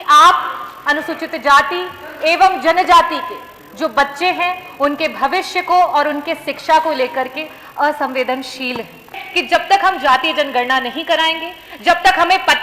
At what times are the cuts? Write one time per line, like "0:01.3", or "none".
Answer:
0:09.3